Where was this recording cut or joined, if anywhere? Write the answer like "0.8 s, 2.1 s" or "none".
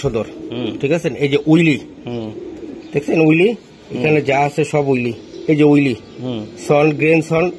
none